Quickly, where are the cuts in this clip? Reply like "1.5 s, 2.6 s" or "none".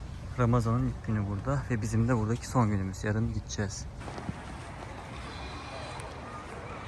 4.0 s